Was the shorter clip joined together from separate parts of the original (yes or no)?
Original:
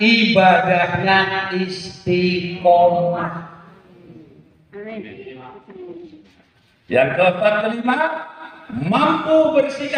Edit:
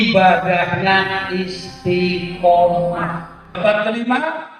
yes